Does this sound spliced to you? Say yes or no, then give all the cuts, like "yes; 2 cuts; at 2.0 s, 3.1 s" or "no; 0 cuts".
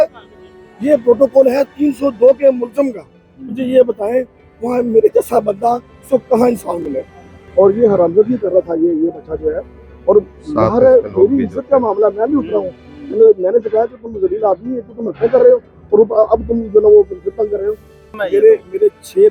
yes; 2 cuts; at 7.4 s, 18.2 s